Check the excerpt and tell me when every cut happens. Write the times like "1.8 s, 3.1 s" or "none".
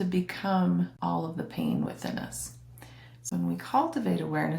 0.9 s, 3.3 s